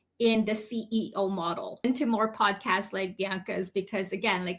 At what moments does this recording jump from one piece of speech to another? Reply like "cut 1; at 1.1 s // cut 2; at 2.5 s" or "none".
cut 1; at 1.8 s